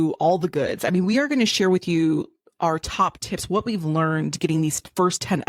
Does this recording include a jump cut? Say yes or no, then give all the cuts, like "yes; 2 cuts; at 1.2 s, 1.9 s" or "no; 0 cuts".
no; 0 cuts